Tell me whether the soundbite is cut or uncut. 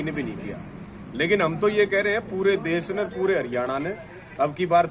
uncut